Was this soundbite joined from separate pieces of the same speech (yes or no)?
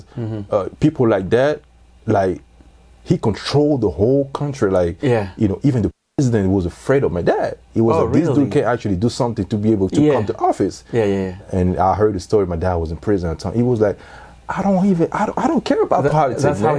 no